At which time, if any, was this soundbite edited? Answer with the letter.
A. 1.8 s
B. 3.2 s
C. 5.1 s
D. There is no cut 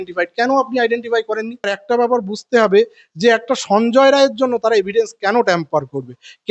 A